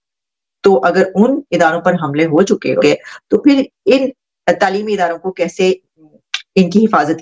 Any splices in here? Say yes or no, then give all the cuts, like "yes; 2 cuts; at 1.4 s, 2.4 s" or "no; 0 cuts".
yes; 1 cut; at 2.8 s